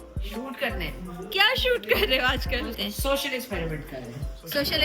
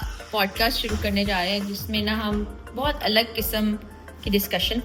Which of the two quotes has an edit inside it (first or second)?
first